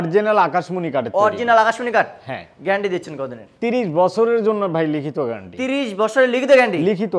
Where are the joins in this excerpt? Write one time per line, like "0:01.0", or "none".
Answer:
none